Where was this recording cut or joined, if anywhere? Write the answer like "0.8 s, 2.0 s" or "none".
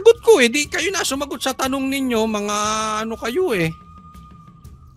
none